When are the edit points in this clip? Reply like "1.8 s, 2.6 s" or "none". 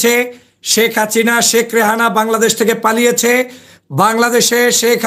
none